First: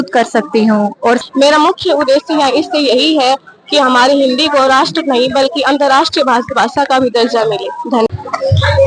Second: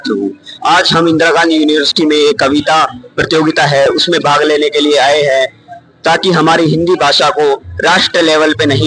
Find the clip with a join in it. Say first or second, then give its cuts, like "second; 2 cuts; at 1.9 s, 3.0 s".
first; 2 cuts; at 1.2 s, 8.1 s